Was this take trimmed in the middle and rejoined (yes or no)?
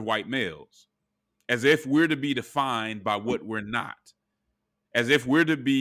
no